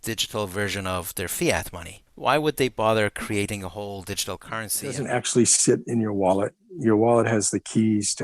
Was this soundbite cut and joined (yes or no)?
yes